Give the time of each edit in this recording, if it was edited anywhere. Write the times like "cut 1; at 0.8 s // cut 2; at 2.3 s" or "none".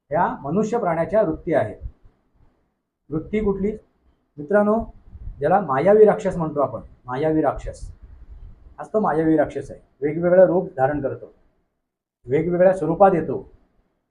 cut 1; at 3.8 s